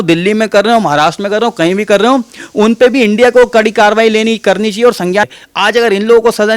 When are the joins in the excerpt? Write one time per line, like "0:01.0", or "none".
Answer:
0:05.3